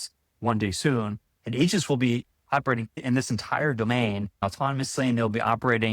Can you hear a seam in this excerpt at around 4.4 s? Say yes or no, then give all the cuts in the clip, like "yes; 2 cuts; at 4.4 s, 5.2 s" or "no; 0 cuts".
yes; 1 cut; at 4.4 s